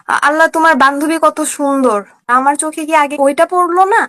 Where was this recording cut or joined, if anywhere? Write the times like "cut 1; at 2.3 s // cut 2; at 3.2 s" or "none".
none